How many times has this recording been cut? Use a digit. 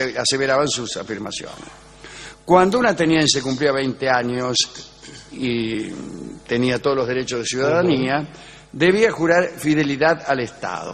0